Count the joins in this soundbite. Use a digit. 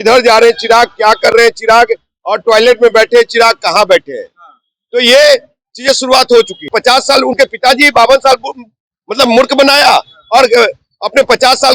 1